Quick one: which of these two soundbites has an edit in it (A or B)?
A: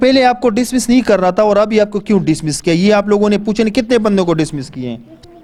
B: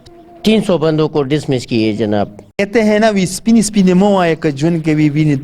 B